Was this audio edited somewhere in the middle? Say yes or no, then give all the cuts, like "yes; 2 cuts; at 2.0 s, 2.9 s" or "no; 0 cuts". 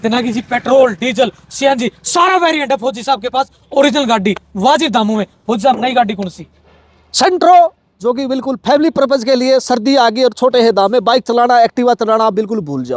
no; 0 cuts